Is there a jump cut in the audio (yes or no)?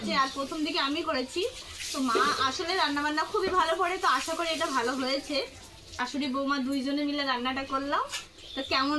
yes